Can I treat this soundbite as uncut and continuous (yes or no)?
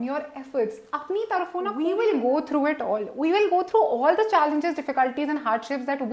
no